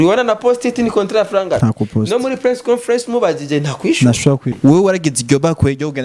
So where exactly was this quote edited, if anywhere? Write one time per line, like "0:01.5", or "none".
0:04.5